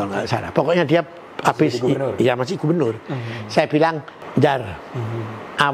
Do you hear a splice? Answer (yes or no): yes